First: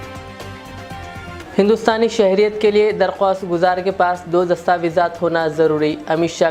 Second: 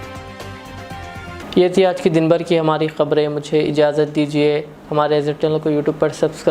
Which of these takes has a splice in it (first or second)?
first